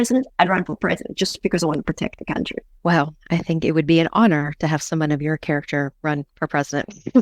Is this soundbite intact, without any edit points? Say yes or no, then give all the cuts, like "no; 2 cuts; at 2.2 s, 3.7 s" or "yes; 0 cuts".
no; 2 cuts; at 2.6 s, 6.0 s